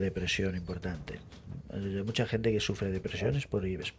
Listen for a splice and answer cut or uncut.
uncut